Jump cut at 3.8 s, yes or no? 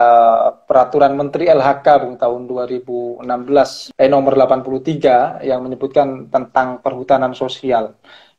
yes